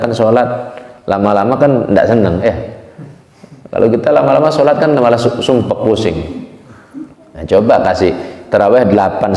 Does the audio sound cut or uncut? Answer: uncut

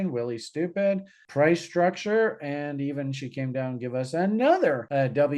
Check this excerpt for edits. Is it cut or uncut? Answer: uncut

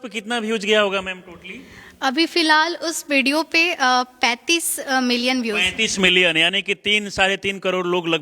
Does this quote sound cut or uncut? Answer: uncut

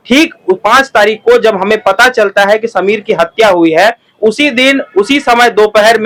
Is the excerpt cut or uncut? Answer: uncut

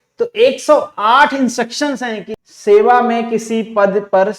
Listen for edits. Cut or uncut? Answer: cut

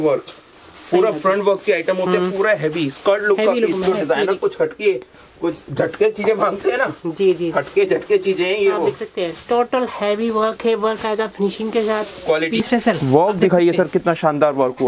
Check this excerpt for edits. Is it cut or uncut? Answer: cut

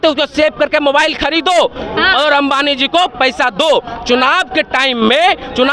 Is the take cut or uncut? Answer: uncut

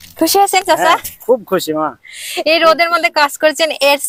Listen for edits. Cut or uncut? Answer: uncut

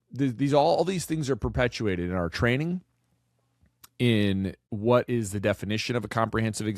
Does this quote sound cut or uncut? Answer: cut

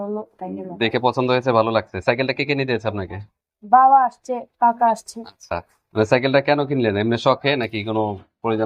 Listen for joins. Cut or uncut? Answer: uncut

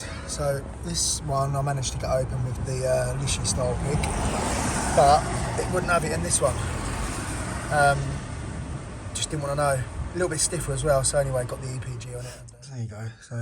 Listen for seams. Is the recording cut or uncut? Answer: cut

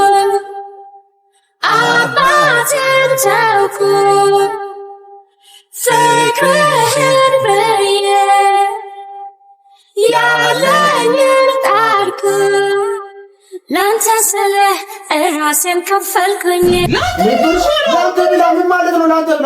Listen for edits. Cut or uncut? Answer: cut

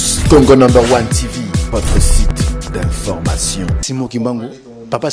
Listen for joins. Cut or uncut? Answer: cut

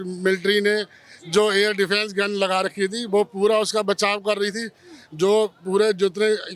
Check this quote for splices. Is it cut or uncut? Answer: uncut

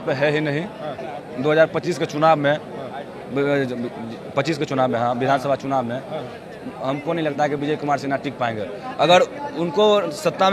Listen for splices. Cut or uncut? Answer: uncut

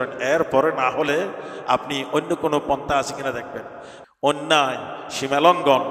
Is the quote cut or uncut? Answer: cut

